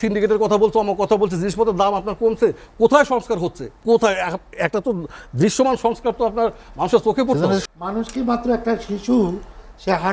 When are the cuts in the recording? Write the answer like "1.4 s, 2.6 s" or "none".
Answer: 7.6 s